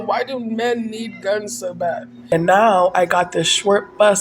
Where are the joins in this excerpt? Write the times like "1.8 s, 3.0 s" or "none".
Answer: 2.1 s